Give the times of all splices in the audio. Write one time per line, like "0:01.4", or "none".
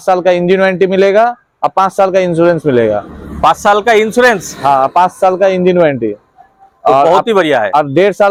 none